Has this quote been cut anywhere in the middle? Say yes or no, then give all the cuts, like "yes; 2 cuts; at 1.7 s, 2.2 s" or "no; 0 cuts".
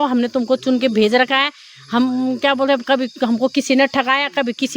no; 0 cuts